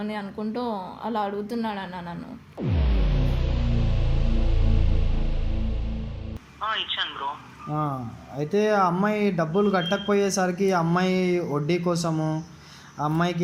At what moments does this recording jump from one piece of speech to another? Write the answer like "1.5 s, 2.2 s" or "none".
6.5 s